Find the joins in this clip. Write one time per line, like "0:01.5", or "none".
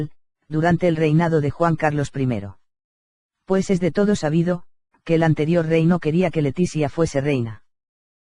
0:05.3